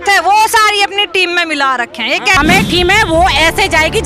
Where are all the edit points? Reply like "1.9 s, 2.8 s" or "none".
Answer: 2.4 s